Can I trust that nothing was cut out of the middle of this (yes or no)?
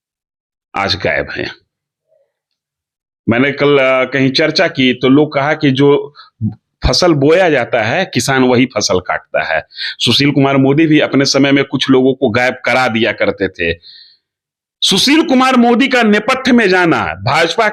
yes